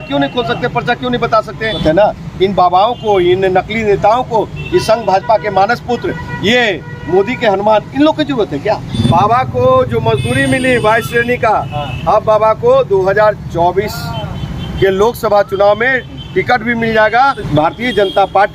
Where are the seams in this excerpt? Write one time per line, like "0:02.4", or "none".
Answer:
0:01.8
0:08.9
0:17.4